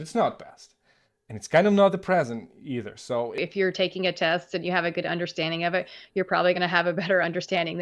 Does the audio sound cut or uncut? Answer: cut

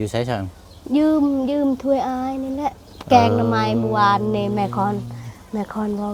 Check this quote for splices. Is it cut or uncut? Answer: uncut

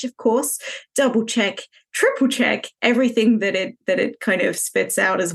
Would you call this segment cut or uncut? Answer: uncut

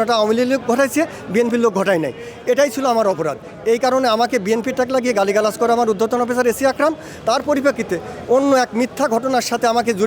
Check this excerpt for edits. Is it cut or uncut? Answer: uncut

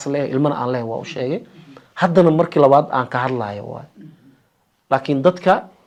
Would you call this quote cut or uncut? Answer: uncut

